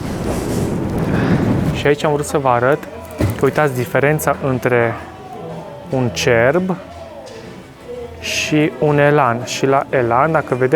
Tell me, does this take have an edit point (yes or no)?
yes